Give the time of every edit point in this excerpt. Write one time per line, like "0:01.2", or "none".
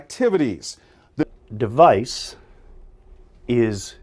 0:01.2

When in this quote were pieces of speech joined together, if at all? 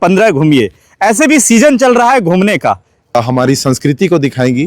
0:03.2

